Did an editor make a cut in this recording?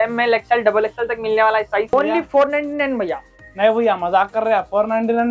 yes; 1 cut; at 1.9 s

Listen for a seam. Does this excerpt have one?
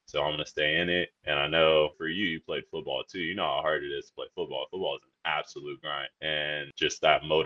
yes; 1 cut; at 1.2 s

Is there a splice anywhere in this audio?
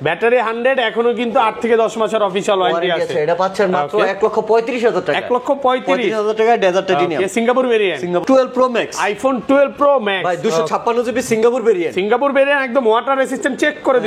yes; 1 cut; at 8.2 s

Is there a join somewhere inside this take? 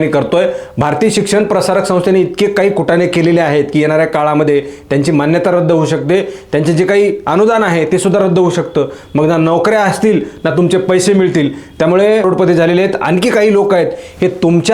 yes; 1 cut; at 12.2 s

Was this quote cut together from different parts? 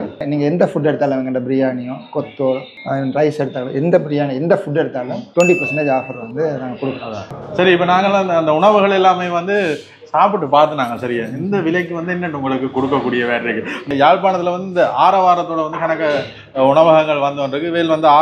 yes; 2 cuts; at 7.3 s, 13.9 s

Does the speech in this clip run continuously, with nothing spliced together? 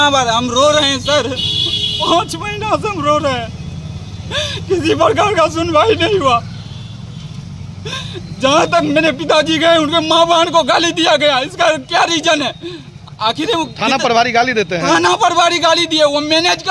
yes; 0 cuts

